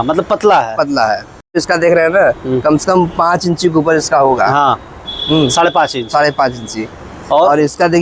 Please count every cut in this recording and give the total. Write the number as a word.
two